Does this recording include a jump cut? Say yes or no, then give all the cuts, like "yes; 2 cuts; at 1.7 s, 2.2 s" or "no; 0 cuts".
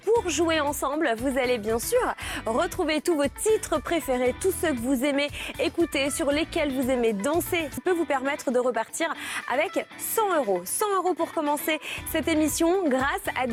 no; 0 cuts